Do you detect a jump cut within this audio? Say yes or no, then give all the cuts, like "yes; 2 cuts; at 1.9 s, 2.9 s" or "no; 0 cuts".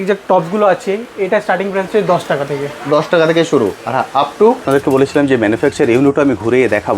yes; 1 cut; at 4.6 s